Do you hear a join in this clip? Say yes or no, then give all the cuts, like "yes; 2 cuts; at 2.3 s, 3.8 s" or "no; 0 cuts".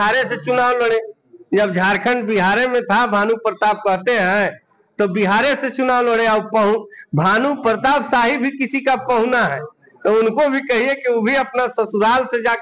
no; 0 cuts